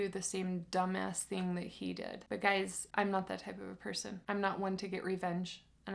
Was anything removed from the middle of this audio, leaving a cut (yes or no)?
no